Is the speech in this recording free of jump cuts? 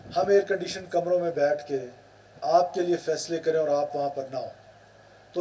yes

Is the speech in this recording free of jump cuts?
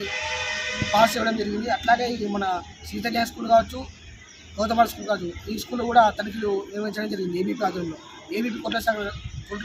yes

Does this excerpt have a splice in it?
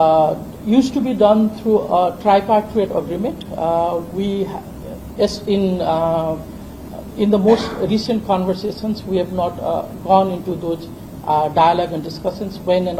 no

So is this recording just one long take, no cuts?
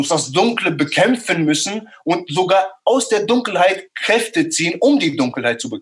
yes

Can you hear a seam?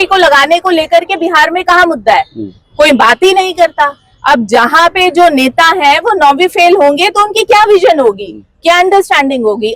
no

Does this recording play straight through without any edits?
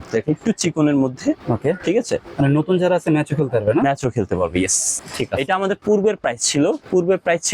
no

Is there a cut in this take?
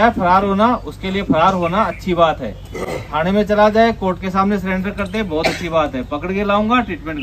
no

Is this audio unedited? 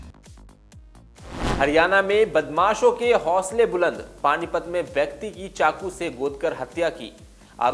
yes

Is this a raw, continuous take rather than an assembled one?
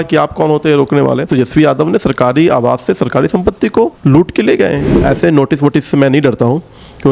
no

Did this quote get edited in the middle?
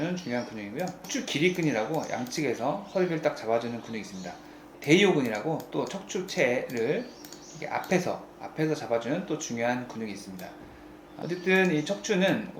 yes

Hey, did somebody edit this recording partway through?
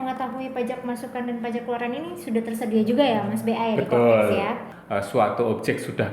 yes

